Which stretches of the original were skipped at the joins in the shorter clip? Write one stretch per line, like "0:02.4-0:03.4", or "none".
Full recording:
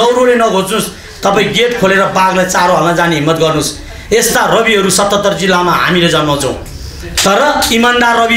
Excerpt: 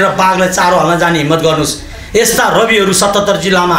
none

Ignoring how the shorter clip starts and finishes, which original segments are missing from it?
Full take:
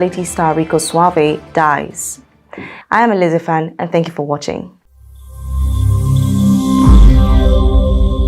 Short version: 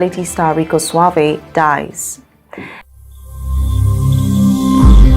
0:02.7-0:04.8

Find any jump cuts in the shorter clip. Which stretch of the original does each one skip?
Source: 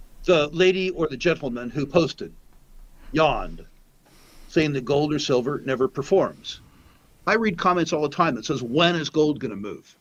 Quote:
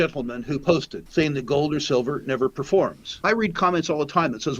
0:02.2-0:04.4
0:06.5-0:07.1

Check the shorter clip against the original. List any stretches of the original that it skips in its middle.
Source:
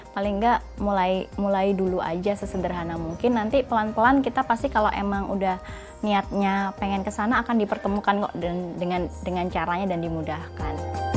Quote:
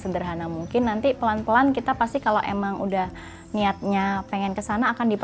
none

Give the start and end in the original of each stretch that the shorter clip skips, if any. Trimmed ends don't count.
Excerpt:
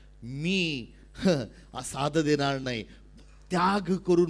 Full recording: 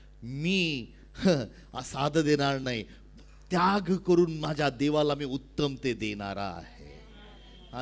none

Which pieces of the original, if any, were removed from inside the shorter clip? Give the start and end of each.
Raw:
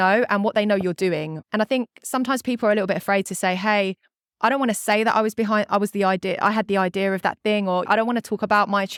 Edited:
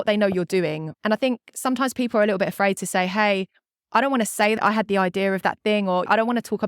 0:05.0-0:06.4

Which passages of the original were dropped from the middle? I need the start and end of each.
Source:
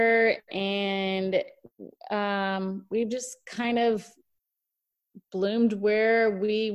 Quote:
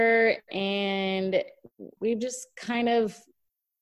0:01.9-0:02.8

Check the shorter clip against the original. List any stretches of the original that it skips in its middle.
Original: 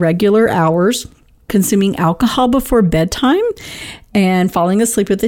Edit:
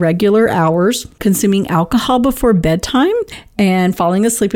0:01.1-0:01.4
0:03.7-0:03.9

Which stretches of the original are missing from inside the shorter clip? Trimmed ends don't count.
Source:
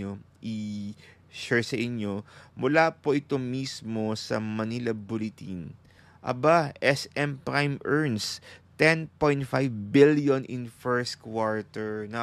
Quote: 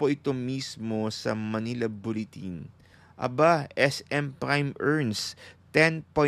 none

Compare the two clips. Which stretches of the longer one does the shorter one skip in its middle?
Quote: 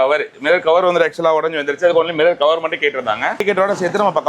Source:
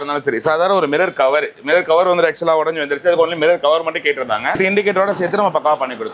0:04.6-0:04.8

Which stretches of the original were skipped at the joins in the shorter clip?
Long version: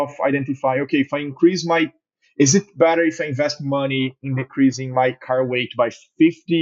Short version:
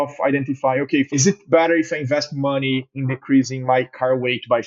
0:01.1-0:02.4

